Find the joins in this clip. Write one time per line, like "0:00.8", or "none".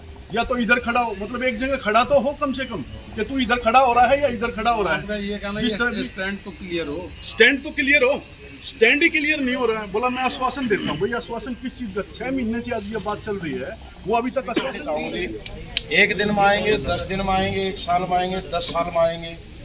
0:14.8